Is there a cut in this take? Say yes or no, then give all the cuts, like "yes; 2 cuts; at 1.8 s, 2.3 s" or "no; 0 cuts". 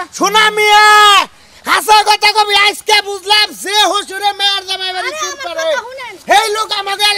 no; 0 cuts